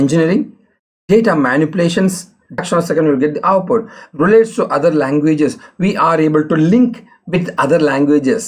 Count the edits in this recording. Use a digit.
1